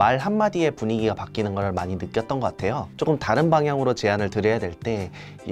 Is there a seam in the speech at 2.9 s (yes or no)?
yes